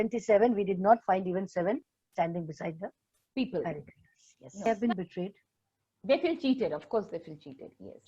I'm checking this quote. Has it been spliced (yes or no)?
yes